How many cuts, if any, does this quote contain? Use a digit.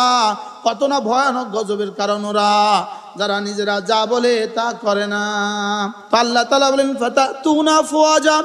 1